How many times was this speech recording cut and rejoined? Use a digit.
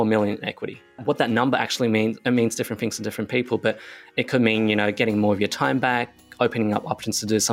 1